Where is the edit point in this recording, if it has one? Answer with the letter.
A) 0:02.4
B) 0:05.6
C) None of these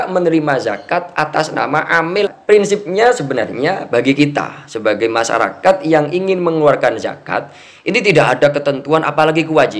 A